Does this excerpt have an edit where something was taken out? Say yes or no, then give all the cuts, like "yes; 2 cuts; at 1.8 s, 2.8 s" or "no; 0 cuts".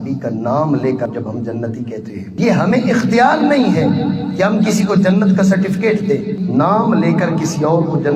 no; 0 cuts